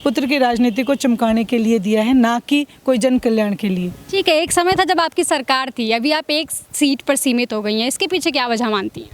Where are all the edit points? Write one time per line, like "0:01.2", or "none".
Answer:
none